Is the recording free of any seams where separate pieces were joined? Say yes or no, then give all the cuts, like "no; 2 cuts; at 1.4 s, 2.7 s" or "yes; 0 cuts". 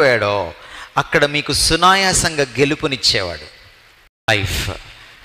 no; 1 cut; at 4.3 s